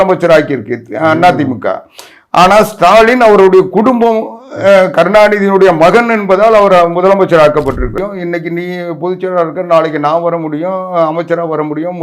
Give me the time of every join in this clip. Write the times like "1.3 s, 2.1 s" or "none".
7.9 s